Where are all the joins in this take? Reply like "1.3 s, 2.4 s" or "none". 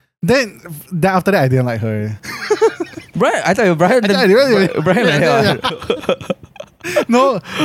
none